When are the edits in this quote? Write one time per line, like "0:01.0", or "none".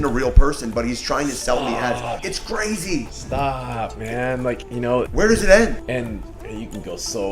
0:02.2
0:03.2
0:04.8
0:05.9